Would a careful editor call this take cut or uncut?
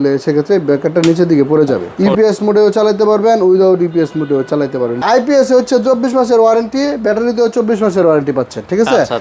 cut